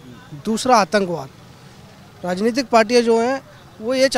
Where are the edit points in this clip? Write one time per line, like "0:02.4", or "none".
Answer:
none